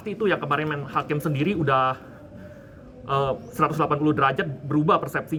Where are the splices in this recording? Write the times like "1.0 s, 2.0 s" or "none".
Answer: none

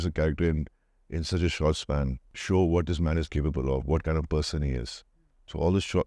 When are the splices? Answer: none

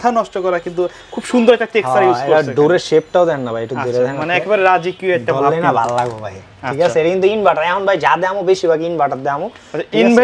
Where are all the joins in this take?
none

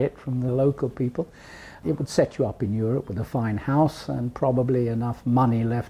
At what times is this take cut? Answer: 1.8 s

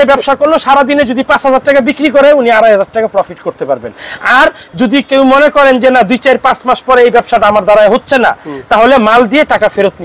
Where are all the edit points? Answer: none

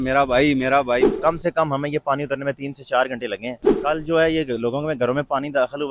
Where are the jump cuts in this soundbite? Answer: 1.1 s, 3.7 s

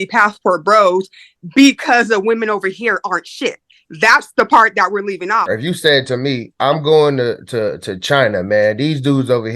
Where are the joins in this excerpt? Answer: 5.5 s

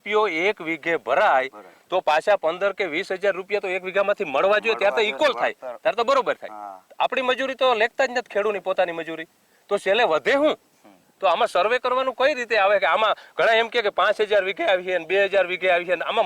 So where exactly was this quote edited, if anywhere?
none

